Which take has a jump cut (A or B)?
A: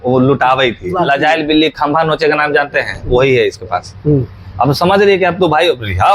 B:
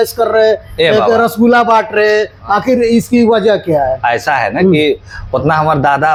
A